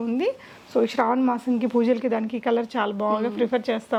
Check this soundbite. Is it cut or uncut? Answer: uncut